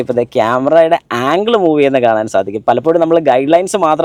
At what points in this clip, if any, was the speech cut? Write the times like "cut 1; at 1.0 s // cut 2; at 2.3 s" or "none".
none